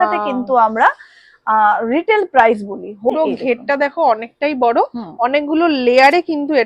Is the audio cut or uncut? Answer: cut